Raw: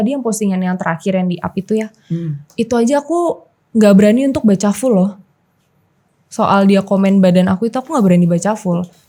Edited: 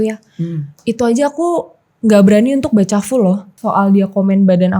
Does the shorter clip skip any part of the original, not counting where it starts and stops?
yes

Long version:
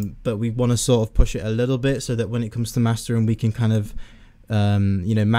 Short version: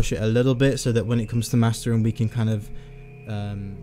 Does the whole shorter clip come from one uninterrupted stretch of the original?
yes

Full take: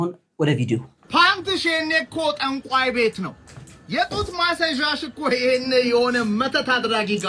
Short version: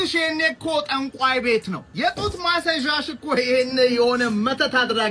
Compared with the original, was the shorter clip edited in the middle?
yes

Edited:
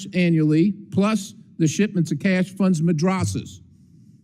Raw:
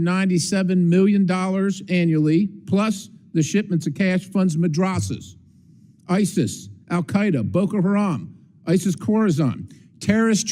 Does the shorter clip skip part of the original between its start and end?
no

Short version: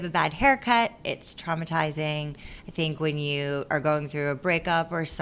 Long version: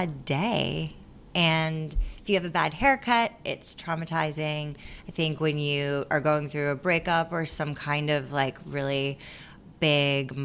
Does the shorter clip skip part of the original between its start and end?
no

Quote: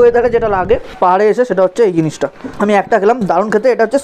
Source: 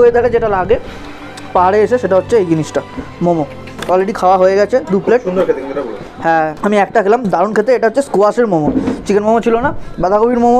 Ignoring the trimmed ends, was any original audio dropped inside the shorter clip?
yes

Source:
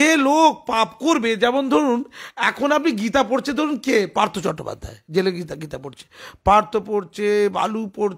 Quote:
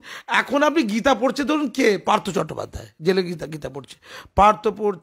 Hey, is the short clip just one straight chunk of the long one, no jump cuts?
yes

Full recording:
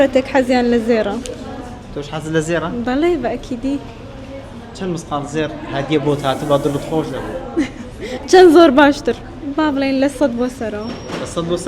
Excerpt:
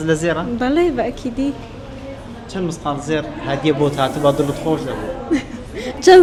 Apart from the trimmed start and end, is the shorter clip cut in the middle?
no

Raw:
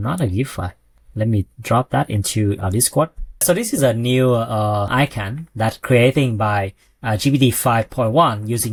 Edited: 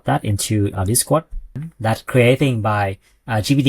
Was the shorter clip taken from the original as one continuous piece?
no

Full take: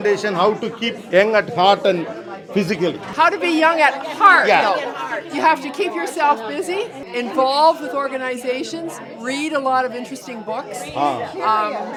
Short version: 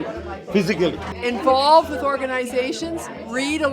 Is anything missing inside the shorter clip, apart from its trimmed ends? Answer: yes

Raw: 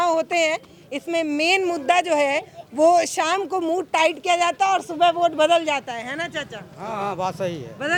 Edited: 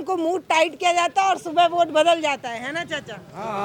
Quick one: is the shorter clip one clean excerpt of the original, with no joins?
yes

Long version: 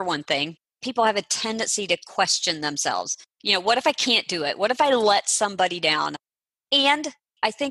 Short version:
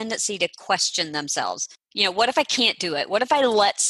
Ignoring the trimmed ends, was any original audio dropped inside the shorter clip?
no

